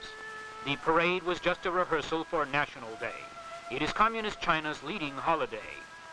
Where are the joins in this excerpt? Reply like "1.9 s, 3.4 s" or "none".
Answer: none